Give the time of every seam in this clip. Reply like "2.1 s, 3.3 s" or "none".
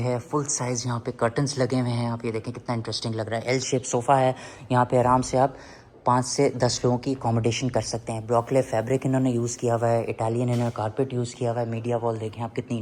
none

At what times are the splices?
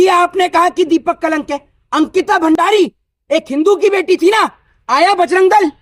none

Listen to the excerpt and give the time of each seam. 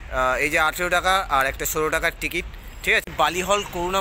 3.1 s

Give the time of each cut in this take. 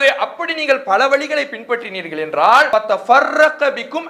2.7 s

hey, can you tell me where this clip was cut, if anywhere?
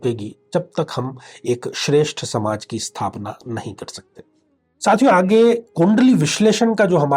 4.6 s

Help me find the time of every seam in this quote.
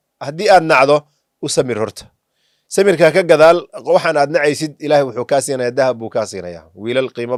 none

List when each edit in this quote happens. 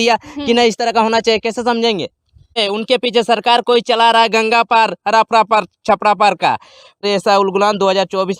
2.6 s, 7.0 s

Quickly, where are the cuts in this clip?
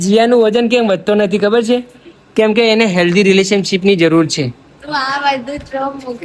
none

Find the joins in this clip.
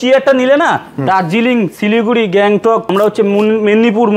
2.9 s

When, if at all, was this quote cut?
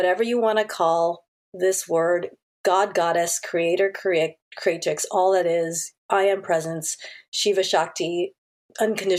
none

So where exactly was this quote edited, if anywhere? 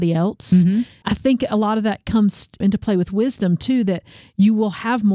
1.0 s, 2.6 s

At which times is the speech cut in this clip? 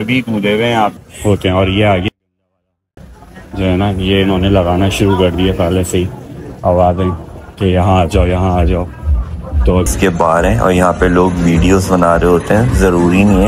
1.0 s, 9.9 s

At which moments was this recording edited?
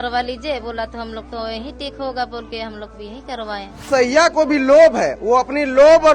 3.9 s

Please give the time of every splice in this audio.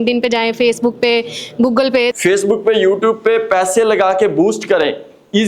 2.2 s

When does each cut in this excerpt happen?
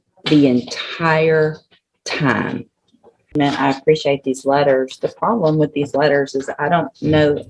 3.3 s

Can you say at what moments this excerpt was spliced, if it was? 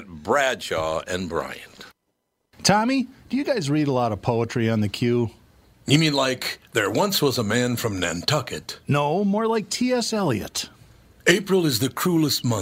2.4 s

